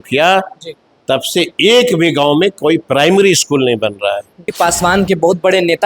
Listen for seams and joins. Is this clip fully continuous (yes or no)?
no